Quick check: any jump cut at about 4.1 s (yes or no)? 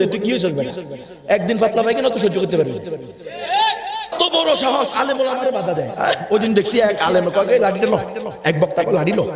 yes